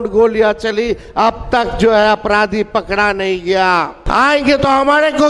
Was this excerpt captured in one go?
no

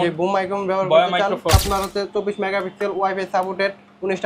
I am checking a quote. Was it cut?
yes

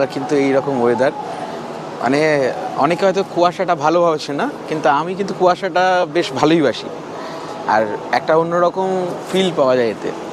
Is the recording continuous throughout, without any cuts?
yes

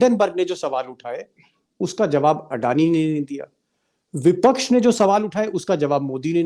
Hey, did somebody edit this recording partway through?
no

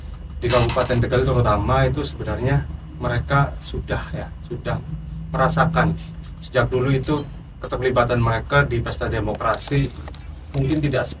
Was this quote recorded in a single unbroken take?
yes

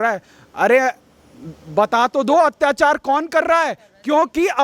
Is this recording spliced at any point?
no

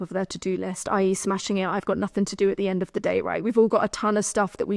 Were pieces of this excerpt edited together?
no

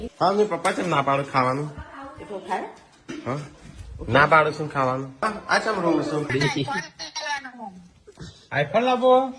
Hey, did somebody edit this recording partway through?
yes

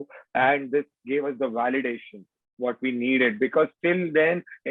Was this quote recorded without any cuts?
yes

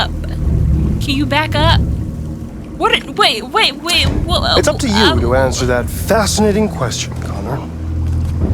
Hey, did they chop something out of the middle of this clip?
yes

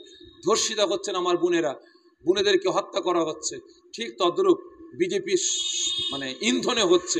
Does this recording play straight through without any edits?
yes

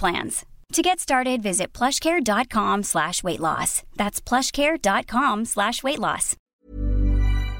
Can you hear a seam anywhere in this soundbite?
yes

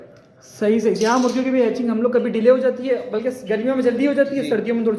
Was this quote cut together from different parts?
no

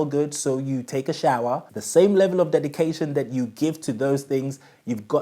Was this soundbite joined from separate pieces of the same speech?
yes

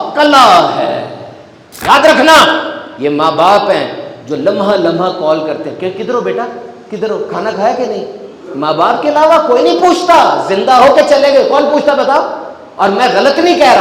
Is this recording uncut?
no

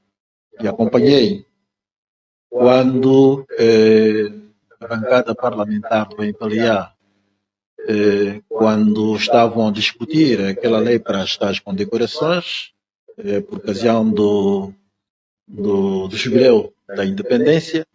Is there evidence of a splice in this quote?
no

